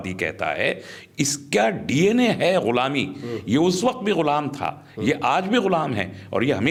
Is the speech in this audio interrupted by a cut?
no; 0 cuts

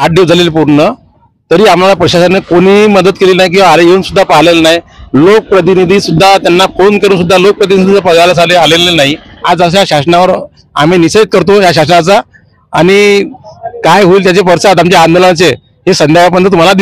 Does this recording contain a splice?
yes; 1 cut; at 9.3 s

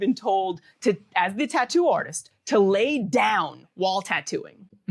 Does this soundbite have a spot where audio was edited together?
no; 0 cuts

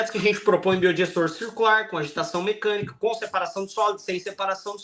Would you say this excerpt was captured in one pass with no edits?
yes; 0 cuts

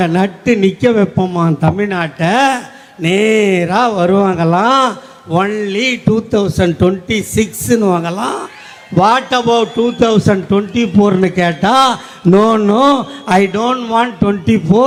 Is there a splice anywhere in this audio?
no; 0 cuts

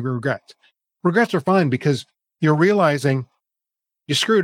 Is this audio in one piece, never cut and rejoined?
yes; 0 cuts

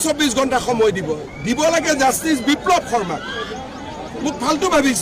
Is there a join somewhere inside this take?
yes; 1 cut; at 3.5 s

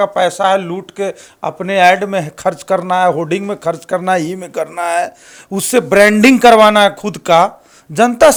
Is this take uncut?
yes; 0 cuts

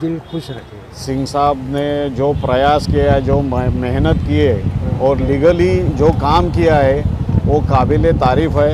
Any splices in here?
yes; 1 cut; at 0.9 s

